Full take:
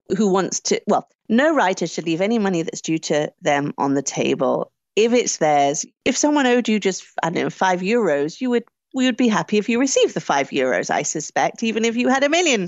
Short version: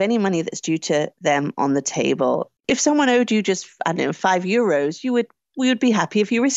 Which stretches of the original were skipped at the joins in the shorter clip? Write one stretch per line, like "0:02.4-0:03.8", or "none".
0:04.7-0:05.9